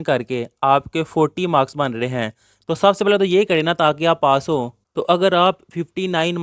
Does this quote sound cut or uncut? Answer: cut